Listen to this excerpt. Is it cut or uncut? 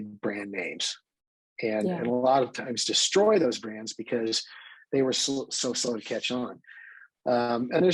uncut